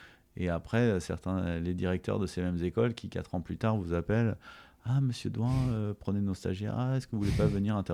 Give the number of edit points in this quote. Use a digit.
0